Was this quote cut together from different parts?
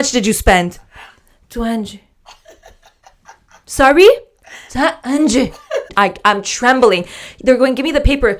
yes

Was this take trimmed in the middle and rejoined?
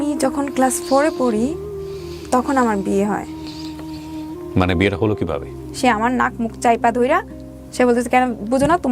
yes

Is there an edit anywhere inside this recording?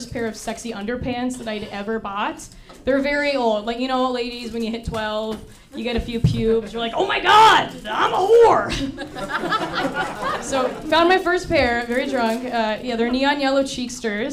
yes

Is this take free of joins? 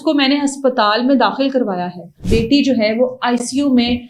no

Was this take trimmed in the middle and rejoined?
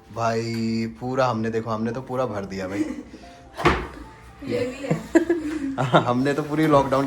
no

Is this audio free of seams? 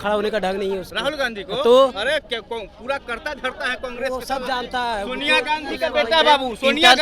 yes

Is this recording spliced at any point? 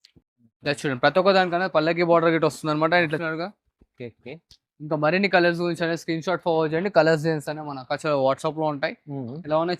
yes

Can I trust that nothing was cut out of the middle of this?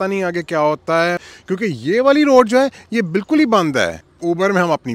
no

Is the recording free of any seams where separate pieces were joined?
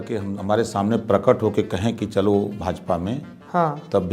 yes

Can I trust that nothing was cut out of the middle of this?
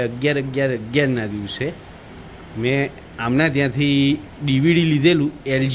yes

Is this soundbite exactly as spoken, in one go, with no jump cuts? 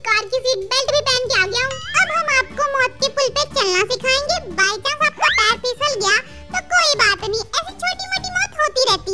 yes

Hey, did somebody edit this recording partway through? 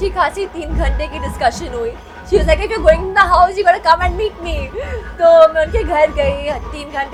no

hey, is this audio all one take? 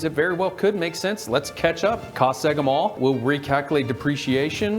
no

